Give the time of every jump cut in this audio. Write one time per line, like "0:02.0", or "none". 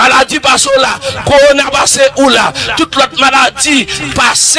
none